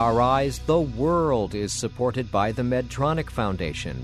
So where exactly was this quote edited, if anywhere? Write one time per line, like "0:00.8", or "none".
none

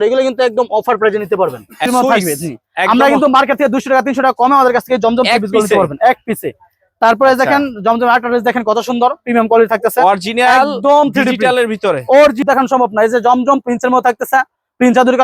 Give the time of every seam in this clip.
0:01.9
0:12.4

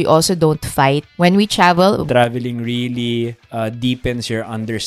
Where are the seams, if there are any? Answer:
0:01.1
0:02.0
0:03.4

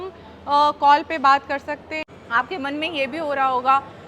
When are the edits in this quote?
0:02.0

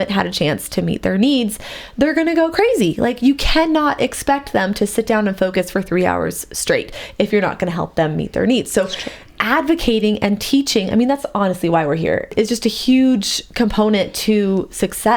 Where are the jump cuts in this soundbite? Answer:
0:12.3

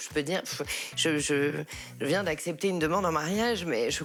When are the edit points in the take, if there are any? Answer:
none

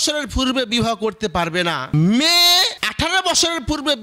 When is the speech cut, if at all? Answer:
0:01.9
0:02.8

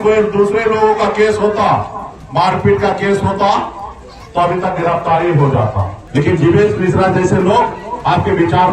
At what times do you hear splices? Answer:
0:05.9

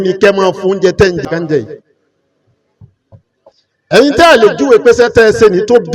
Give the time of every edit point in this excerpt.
0:01.2

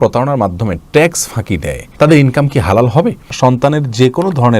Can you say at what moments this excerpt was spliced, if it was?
0:01.8
0:03.3

